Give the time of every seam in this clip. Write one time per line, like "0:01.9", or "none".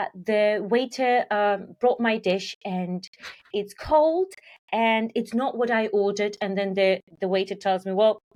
none